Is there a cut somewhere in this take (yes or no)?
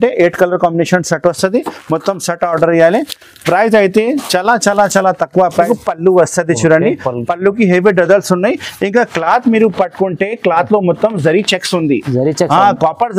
yes